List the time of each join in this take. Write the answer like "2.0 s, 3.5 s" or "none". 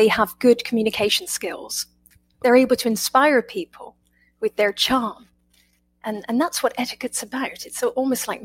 none